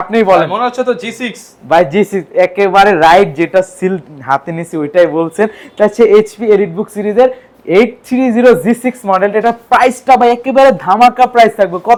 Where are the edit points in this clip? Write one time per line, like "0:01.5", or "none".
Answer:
none